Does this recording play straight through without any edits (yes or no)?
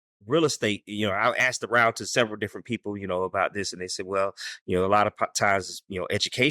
yes